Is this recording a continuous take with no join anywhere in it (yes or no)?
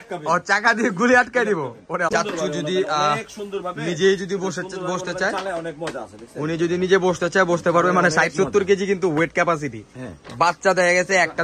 no